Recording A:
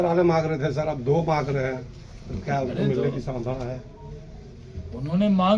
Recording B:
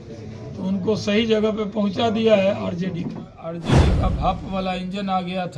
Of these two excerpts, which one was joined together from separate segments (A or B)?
B